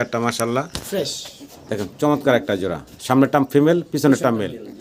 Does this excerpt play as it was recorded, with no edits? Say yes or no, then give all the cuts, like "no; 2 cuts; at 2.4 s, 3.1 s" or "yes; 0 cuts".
yes; 0 cuts